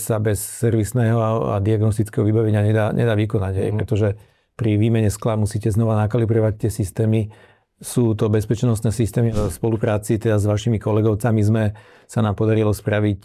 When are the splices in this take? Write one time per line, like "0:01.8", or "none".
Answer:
0:09.4